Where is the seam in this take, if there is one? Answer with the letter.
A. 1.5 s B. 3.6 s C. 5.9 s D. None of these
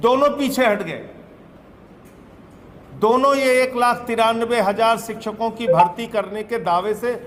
D